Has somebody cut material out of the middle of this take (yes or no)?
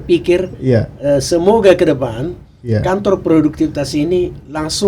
no